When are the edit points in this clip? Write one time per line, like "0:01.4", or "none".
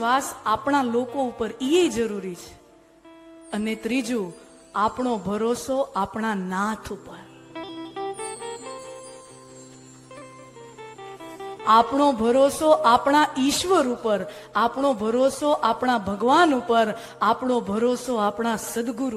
none